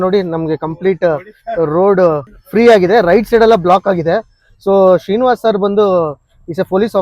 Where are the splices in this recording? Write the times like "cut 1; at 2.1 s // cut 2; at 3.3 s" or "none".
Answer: cut 1; at 2.3 s

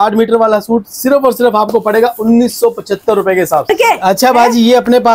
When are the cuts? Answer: cut 1; at 3.7 s

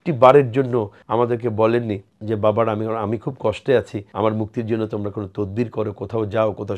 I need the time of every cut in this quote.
cut 1; at 1.0 s // cut 2; at 2.1 s // cut 3; at 4.0 s

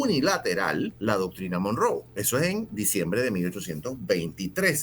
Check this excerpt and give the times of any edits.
cut 1; at 0.9 s // cut 2; at 2.1 s

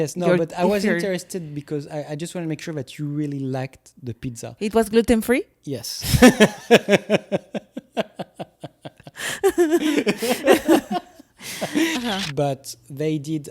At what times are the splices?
cut 1; at 11.9 s

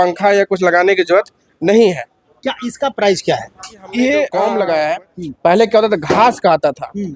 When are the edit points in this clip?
cut 1; at 4.3 s

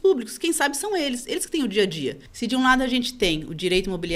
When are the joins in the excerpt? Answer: cut 1; at 2.3 s

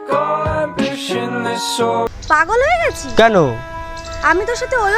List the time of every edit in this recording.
none

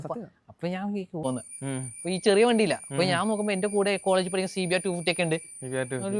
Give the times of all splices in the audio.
cut 1; at 1.2 s

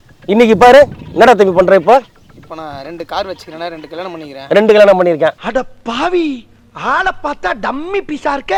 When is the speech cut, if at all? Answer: none

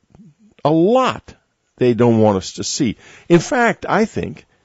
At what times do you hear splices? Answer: cut 1; at 2.2 s

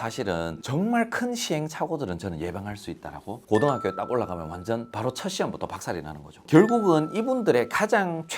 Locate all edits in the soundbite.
cut 1; at 3.3 s // cut 2; at 6.3 s

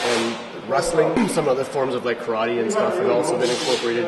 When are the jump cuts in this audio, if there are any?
cut 1; at 1.2 s

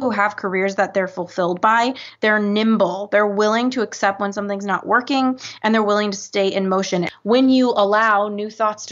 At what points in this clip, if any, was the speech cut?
cut 1; at 7.1 s

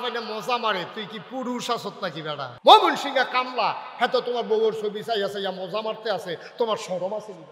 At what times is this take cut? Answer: cut 1; at 2.5 s

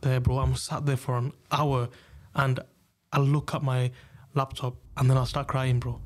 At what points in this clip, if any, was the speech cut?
cut 1; at 4.8 s

